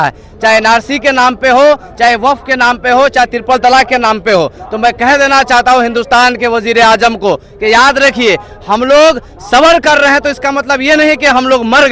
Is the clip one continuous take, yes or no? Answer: yes